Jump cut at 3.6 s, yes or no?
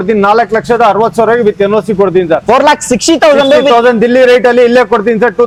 no